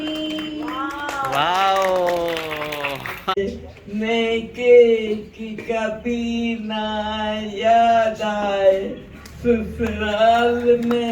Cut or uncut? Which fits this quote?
cut